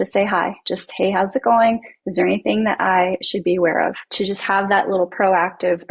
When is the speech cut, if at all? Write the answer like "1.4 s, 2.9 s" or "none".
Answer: 4.1 s